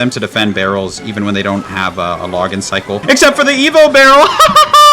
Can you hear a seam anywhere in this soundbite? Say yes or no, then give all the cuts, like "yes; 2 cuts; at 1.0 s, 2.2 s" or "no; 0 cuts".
yes; 1 cut; at 3.0 s